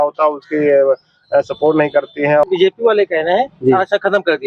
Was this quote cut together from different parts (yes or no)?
yes